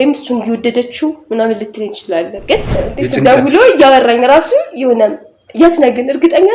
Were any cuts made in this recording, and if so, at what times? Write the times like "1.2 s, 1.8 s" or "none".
2.7 s